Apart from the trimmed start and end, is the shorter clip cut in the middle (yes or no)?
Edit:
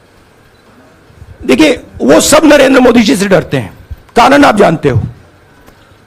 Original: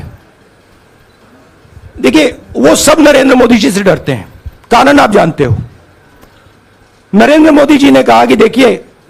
no